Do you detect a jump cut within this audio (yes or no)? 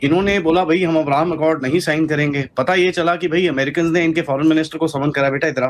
no